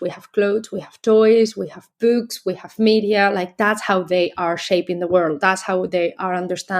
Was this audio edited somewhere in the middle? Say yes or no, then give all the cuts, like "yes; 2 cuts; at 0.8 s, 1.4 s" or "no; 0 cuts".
no; 0 cuts